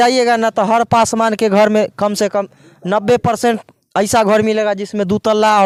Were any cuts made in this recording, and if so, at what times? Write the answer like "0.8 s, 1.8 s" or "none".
none